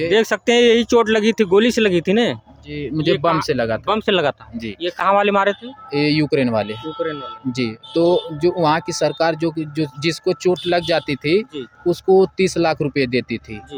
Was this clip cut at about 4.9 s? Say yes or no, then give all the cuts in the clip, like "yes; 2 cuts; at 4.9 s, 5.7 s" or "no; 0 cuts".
no; 0 cuts